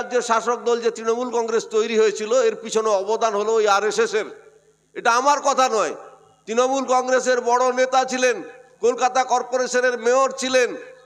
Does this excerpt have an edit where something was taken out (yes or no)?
no